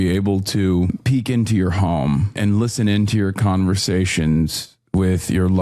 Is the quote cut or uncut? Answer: cut